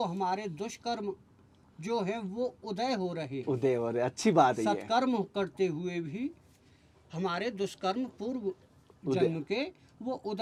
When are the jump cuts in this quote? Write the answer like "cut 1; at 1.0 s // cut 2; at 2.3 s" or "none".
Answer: none

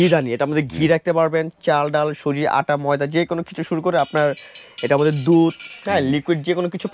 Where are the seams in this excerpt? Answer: none

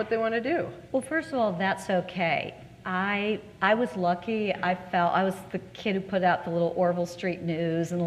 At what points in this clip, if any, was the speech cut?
cut 1; at 6.1 s

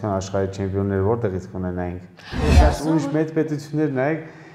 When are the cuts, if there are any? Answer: cut 1; at 2.5 s

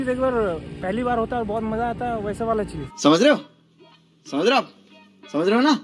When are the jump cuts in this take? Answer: cut 1; at 2.9 s

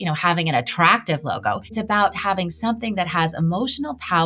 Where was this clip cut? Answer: cut 1; at 1.7 s

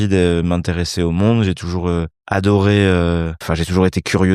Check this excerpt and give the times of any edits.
cut 1; at 2.2 s // cut 2; at 3.4 s

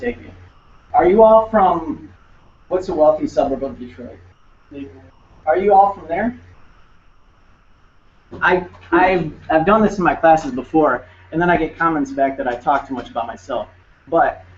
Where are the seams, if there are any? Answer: cut 1; at 3.3 s

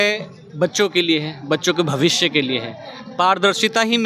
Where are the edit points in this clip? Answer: none

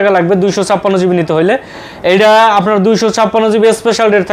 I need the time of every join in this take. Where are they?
none

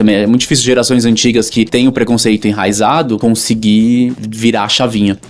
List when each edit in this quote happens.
cut 1; at 1.7 s // cut 2; at 3.2 s // cut 3; at 4.2 s

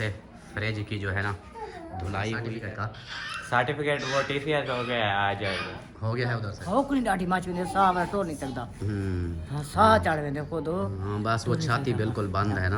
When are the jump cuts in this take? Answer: cut 1; at 2.6 s // cut 2; at 6.5 s

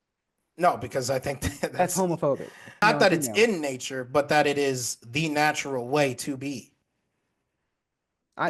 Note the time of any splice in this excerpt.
cut 1; at 2.8 s

